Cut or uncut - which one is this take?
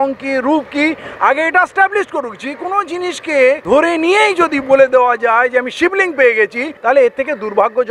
cut